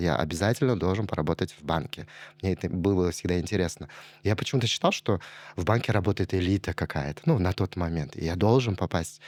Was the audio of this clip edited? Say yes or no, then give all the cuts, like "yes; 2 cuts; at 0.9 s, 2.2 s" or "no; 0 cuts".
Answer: no; 0 cuts